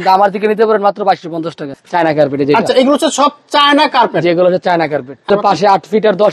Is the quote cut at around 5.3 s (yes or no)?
yes